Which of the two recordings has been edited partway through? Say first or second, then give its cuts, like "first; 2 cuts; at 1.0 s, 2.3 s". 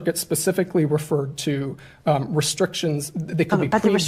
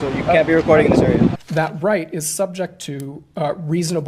second; 1 cut; at 1.4 s